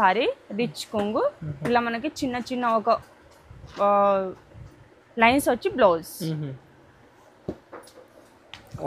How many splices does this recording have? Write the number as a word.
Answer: zero